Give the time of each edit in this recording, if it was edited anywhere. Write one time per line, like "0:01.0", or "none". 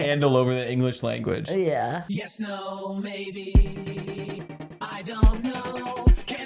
0:02.0